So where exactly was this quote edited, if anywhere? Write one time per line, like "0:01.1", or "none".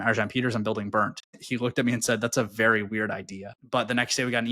0:01.4
0:03.5